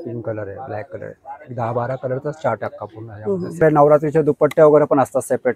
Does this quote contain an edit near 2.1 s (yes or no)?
no